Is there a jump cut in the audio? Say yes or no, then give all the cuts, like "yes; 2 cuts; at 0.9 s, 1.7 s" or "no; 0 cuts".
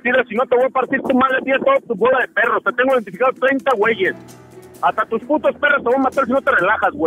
no; 0 cuts